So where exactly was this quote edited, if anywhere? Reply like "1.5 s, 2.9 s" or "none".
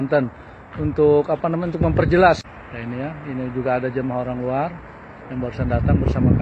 2.6 s